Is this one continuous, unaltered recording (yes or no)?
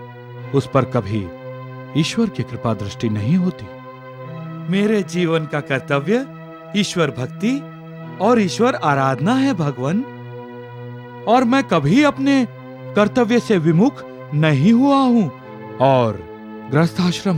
yes